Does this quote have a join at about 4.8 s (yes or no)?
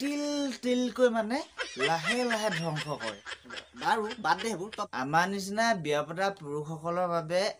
yes